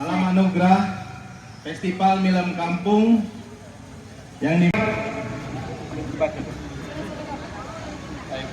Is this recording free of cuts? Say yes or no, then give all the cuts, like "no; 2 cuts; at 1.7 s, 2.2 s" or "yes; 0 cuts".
no; 1 cut; at 4.7 s